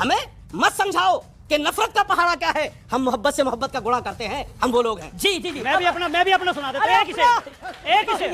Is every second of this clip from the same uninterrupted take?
yes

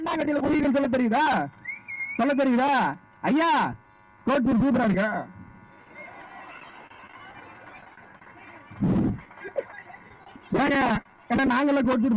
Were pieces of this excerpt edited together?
no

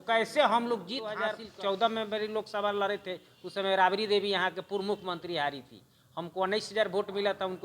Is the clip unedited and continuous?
no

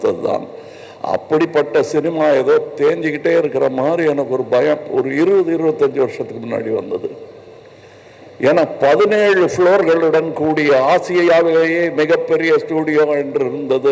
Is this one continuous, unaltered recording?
yes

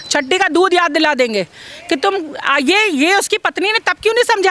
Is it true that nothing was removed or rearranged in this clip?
yes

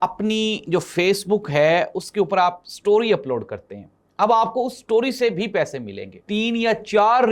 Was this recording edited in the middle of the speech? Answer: yes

